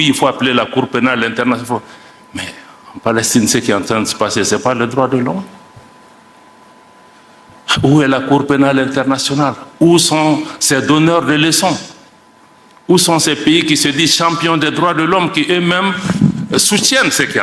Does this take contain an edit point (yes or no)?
no